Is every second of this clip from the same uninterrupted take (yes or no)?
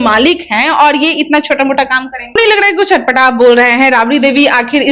no